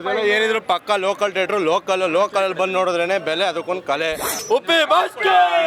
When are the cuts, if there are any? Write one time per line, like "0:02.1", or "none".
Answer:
0:04.4